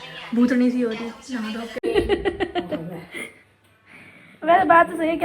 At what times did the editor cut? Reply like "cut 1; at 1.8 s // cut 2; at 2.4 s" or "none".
cut 1; at 1.8 s

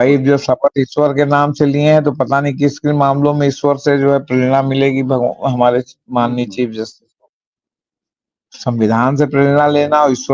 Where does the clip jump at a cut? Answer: none

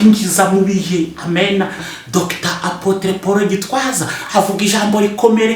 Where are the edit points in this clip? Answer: cut 1; at 1.9 s

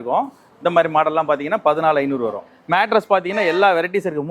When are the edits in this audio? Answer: cut 1; at 2.5 s

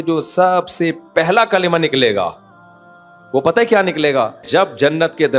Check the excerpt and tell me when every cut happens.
cut 1; at 4.4 s

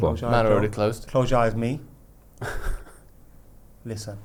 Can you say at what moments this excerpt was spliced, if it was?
none

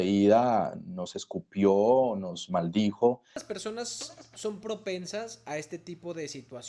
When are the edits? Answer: cut 1; at 3.5 s

